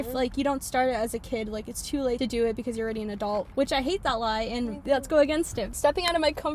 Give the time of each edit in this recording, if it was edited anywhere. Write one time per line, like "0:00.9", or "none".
0:02.2
0:03.5
0:04.8
0:05.7